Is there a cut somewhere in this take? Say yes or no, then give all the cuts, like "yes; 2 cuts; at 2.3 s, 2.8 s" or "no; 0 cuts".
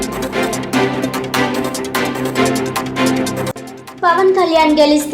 yes; 1 cut; at 3.1 s